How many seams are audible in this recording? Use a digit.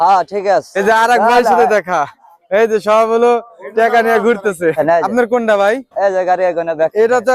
2